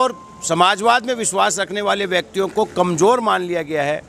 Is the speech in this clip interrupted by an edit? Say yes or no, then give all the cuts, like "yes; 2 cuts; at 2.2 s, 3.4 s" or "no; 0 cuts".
no; 0 cuts